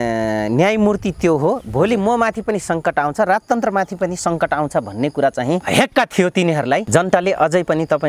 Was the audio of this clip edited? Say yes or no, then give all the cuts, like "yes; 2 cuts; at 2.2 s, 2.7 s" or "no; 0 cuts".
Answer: yes; 2 cuts; at 5.6 s, 6.8 s